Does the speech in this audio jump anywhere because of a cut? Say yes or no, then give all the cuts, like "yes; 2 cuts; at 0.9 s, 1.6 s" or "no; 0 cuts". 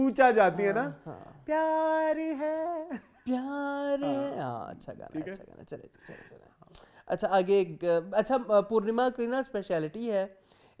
no; 0 cuts